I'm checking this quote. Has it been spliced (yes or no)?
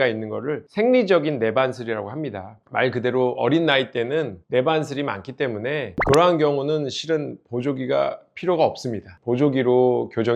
no